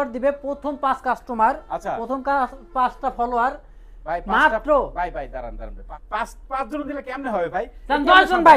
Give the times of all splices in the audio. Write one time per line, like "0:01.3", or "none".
none